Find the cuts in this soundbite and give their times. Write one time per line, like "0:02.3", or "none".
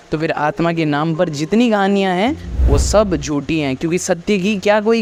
none